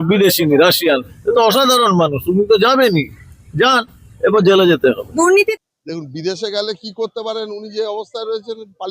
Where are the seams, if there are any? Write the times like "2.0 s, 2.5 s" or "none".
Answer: 5.3 s